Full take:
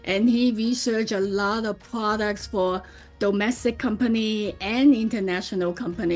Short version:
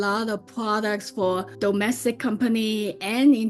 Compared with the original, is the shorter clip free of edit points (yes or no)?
no